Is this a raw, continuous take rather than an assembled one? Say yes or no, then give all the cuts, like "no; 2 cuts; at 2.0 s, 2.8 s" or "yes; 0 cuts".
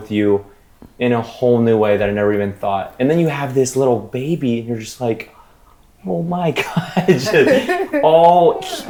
yes; 0 cuts